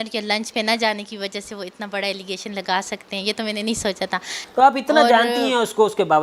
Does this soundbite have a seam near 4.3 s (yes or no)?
yes